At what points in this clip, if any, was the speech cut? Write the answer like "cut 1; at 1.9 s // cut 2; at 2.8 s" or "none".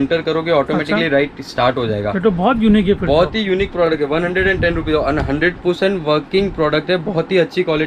none